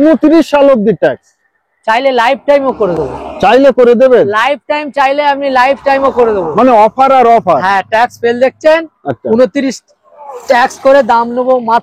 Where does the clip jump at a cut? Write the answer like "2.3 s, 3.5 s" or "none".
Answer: none